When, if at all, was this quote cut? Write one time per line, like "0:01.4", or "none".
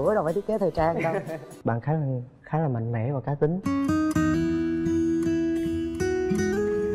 0:01.5